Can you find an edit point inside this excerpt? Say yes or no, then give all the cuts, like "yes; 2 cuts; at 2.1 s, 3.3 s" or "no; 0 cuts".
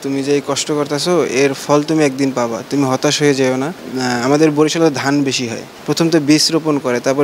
yes; 2 cuts; at 3.8 s, 5.7 s